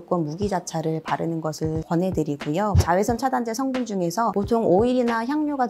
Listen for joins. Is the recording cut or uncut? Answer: cut